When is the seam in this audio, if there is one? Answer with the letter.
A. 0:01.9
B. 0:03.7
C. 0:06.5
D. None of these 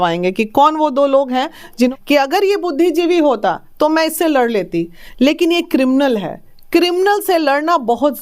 A